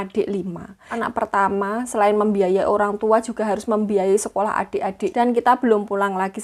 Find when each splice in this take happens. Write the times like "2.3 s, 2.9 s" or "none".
1.0 s, 5.1 s

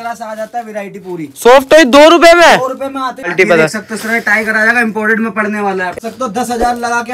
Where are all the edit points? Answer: 3.3 s, 6.0 s

